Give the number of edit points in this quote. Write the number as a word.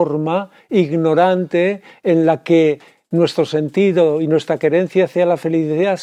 zero